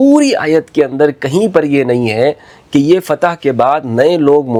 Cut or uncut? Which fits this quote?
uncut